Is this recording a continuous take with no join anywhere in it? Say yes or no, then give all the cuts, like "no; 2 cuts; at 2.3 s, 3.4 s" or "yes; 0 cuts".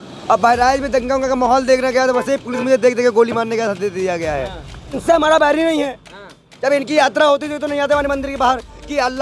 no; 1 cut; at 5.0 s